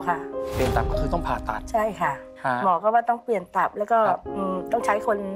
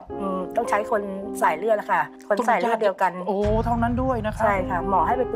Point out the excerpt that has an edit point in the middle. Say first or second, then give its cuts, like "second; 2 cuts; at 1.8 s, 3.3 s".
first; 1 cut; at 2.3 s